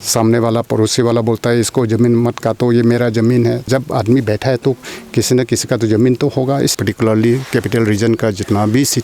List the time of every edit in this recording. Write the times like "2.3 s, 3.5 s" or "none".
3.7 s, 6.7 s